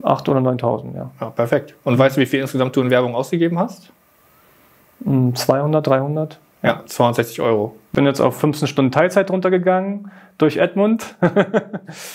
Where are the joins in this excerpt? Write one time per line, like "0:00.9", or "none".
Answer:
0:07.8